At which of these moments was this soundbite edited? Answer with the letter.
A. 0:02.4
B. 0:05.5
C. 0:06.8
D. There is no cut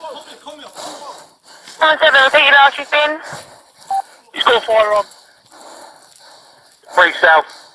D